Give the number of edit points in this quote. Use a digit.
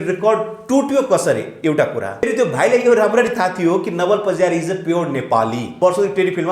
2